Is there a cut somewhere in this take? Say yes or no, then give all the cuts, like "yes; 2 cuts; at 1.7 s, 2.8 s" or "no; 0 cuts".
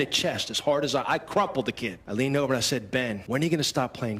yes; 2 cuts; at 1.9 s, 3.2 s